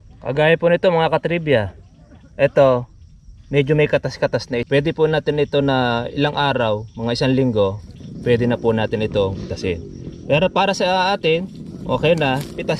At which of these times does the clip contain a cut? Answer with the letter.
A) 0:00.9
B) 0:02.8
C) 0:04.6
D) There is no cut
C